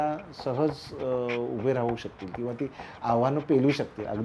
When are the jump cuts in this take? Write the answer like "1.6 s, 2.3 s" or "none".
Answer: none